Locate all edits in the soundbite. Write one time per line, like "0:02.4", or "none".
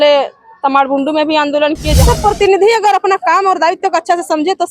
0:01.9